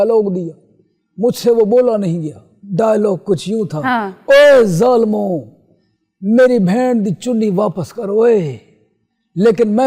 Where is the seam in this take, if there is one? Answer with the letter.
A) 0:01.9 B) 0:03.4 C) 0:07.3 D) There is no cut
D